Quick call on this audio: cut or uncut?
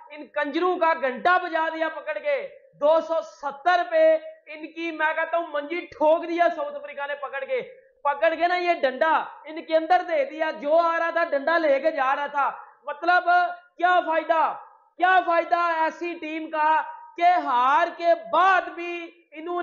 uncut